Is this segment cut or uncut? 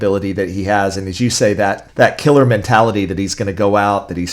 cut